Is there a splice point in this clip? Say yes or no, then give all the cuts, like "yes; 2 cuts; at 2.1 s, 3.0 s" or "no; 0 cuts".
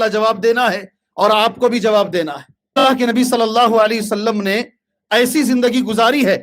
yes; 1 cut; at 2.8 s